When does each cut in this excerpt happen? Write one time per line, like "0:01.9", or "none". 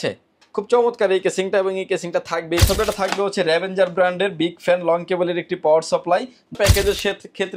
0:02.7
0:06.5